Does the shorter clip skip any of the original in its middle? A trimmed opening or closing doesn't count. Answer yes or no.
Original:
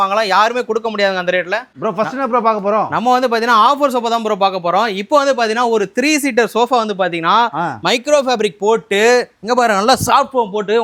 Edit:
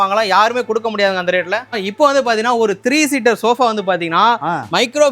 yes